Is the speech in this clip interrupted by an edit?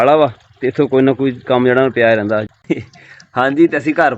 yes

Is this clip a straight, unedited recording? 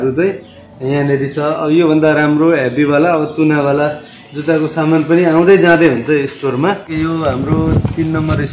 no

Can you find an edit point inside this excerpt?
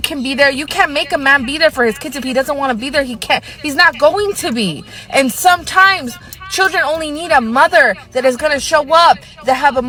no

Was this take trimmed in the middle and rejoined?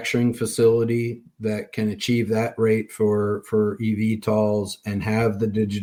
no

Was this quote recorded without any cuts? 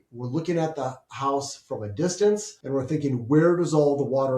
no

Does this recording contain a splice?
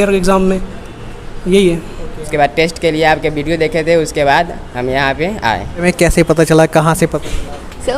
yes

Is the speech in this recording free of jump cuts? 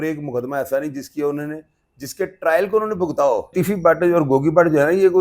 no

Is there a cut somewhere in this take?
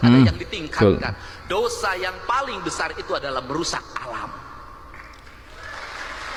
no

